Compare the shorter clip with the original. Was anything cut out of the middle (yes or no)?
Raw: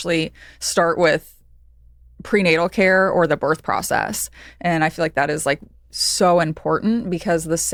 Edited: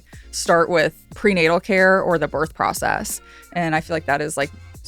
yes